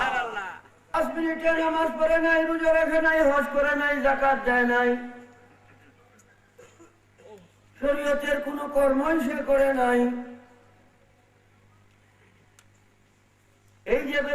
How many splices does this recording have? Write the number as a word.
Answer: one